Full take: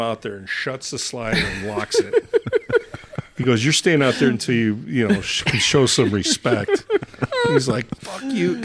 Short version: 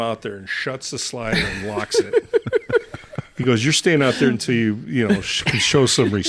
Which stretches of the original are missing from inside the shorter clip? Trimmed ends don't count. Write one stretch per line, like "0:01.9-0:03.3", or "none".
none